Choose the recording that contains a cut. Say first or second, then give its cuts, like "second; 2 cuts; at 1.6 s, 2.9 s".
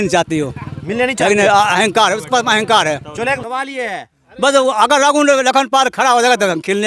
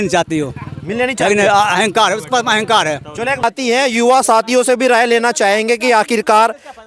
first; 1 cut; at 3.4 s